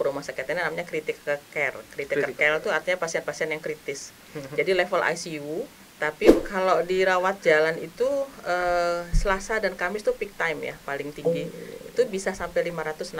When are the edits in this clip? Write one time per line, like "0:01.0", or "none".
0:06.4